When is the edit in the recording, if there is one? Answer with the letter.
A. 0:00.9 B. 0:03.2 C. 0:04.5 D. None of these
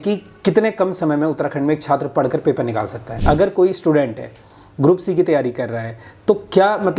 B